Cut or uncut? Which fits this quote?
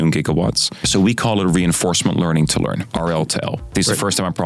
cut